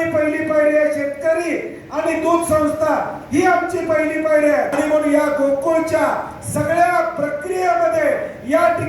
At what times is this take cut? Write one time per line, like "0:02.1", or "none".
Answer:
0:04.8